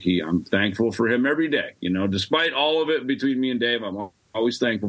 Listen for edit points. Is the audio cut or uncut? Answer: uncut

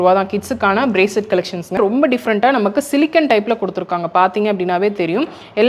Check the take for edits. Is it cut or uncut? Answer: cut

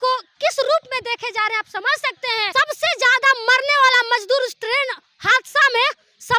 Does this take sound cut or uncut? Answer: cut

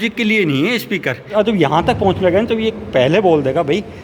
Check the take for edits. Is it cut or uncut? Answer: cut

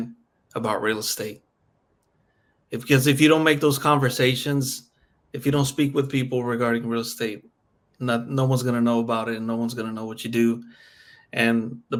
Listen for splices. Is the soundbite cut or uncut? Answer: uncut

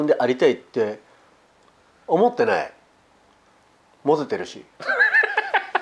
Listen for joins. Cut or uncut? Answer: uncut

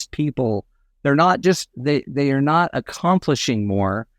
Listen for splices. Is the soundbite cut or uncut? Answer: uncut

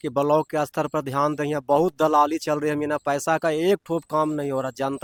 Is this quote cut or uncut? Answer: uncut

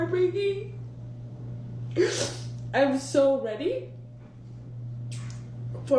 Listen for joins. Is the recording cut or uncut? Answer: uncut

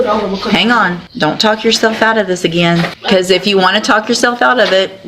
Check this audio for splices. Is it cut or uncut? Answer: cut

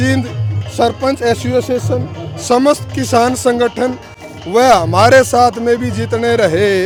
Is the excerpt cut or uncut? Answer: uncut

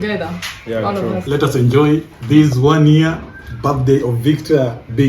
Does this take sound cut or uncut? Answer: cut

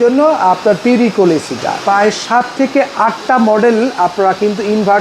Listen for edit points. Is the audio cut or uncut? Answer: cut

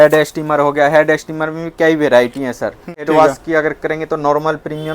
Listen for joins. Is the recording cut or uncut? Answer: cut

